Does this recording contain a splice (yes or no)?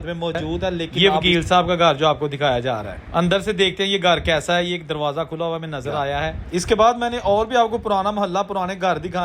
yes